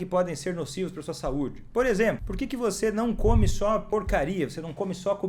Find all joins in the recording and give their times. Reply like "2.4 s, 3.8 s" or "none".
2.3 s, 3.9 s